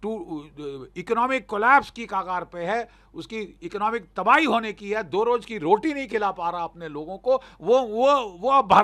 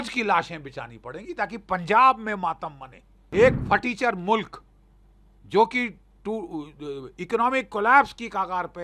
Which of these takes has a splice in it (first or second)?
second